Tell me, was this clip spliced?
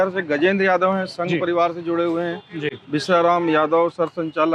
no; 0 cuts

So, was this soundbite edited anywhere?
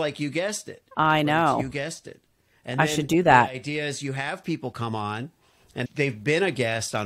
no; 0 cuts

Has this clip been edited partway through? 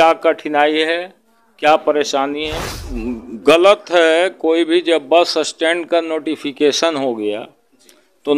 yes; 1 cut; at 3.0 s

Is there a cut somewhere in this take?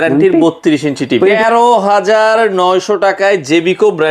yes; 1 cut; at 1.4 s

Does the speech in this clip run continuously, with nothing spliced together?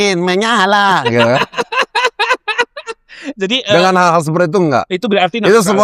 yes; 0 cuts

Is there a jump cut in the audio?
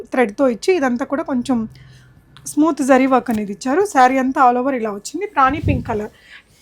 no; 0 cuts

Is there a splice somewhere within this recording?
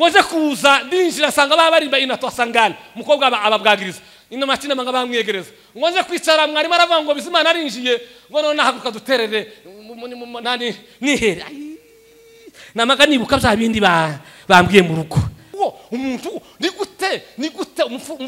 yes; 1 cut; at 15.5 s

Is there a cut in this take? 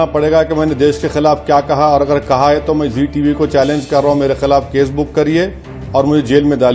no; 0 cuts

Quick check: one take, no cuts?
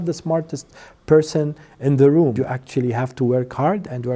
no; 1 cut; at 2.3 s

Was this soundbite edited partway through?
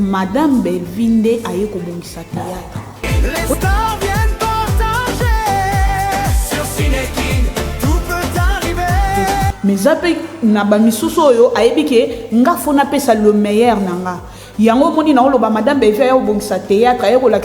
yes; 2 cuts; at 3.1 s, 9.5 s

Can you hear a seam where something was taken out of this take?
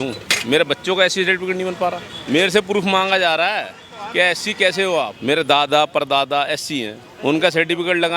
yes; 3 cuts; at 2.1 s, 5.2 s, 7.0 s

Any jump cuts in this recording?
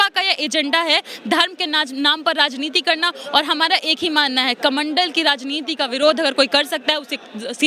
no; 0 cuts

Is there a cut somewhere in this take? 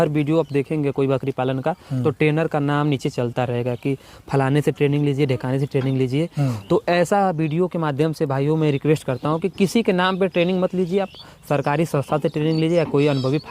no; 0 cuts

